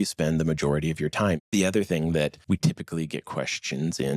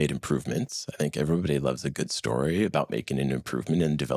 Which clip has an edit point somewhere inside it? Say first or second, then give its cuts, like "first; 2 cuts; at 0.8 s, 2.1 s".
first; 2 cuts; at 1.4 s, 2.4 s